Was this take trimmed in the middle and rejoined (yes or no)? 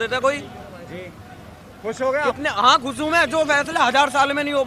no